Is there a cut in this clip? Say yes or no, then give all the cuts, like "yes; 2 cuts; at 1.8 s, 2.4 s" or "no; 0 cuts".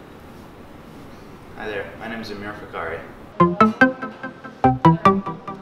yes; 1 cut; at 3.3 s